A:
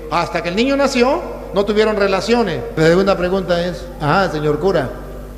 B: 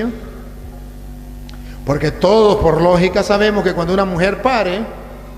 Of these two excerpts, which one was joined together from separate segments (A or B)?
A